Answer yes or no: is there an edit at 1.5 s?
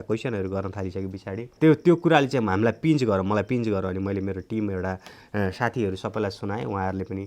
yes